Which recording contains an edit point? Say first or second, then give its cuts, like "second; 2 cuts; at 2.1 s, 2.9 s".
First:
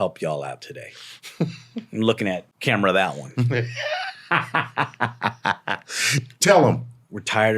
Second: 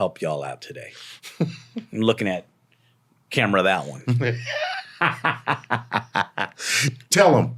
first; 1 cut; at 2.5 s